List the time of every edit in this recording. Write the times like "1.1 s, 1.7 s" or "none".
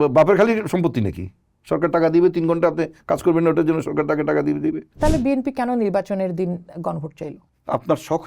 4.9 s

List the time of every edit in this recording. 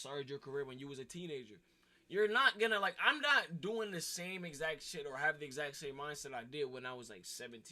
1.8 s

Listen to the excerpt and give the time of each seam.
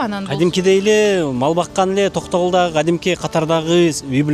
none

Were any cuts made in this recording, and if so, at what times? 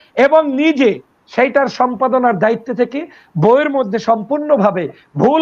none

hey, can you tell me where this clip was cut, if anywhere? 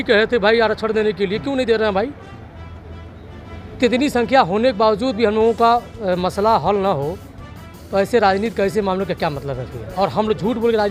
none

